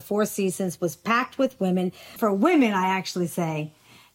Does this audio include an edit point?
yes; 1 cut; at 2.0 s

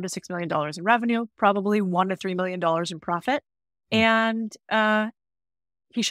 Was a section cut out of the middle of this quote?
no; 0 cuts

